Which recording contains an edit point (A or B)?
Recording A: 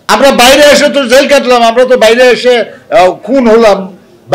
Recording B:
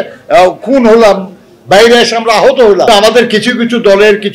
B